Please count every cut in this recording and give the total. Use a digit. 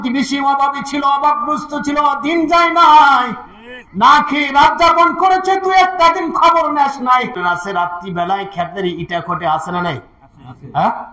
1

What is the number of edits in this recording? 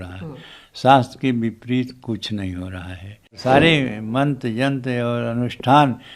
1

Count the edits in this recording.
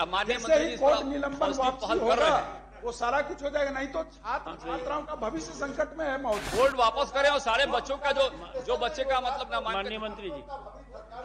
1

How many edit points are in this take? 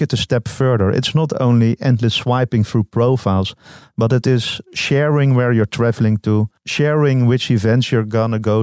1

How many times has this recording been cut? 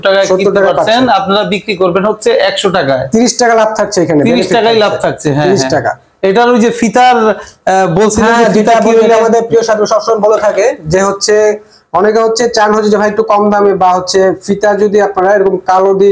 0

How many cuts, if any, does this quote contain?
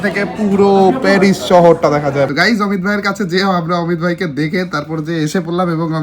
1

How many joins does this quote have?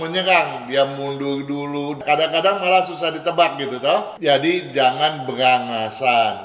2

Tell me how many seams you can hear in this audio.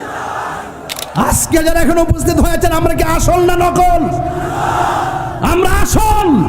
1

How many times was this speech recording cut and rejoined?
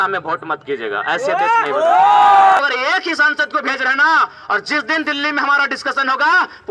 1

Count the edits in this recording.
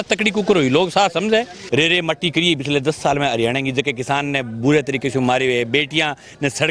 1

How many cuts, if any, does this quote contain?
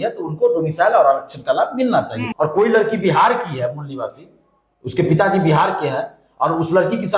1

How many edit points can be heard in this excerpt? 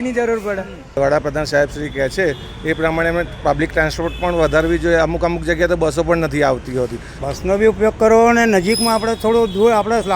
2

